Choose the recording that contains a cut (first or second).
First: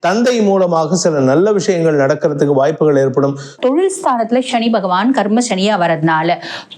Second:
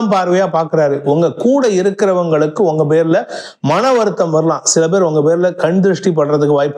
first